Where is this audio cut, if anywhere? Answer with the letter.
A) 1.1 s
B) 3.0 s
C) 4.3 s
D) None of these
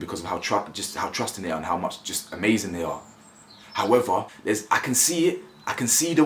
C